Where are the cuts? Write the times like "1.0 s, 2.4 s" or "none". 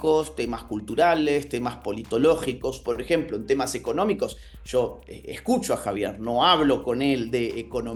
none